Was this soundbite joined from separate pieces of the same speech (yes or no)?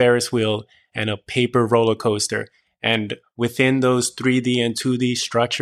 no